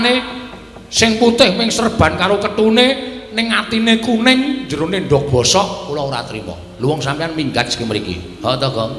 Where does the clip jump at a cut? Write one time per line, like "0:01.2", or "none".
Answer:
none